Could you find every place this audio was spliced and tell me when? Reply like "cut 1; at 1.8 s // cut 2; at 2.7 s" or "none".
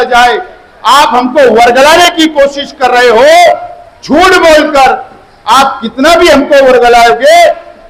none